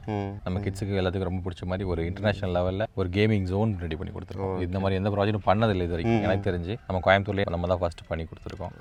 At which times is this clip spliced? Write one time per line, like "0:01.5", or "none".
none